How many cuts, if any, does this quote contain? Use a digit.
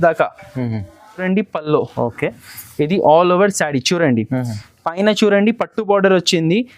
1